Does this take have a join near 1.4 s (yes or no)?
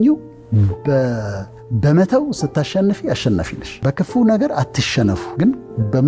no